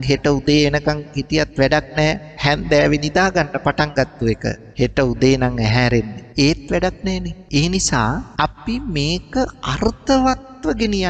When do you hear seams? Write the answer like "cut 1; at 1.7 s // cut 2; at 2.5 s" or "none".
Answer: cut 1; at 2.3 s // cut 2; at 4.6 s // cut 3; at 6.2 s // cut 4; at 7.4 s // cut 5; at 8.3 s

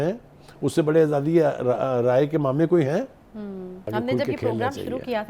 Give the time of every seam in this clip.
cut 1; at 3.9 s

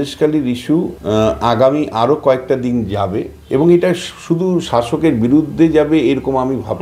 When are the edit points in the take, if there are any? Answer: cut 1; at 1.0 s

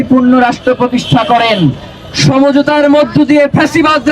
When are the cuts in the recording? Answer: none

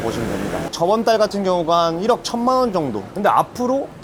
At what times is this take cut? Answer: none

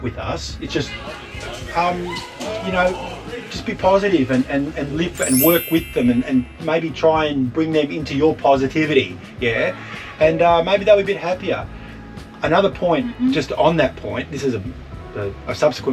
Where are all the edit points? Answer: none

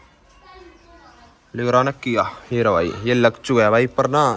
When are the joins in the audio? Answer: none

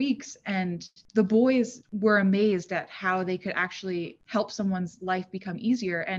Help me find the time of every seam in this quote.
cut 1; at 0.9 s // cut 2; at 1.8 s // cut 3; at 4.2 s

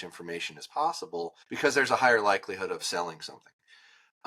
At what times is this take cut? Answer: cut 1; at 1.4 s

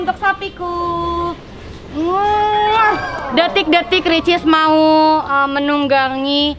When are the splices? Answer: cut 1; at 3.2 s

